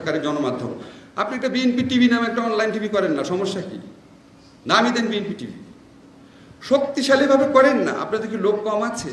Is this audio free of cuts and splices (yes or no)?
yes